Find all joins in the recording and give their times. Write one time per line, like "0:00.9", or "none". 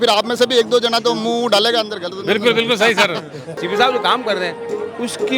0:03.6